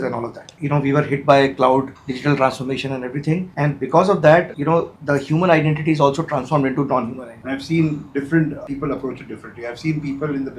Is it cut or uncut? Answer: cut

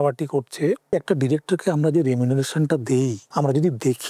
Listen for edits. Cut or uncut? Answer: cut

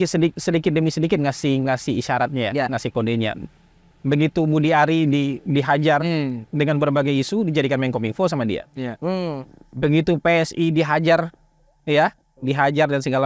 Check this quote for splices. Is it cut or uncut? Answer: uncut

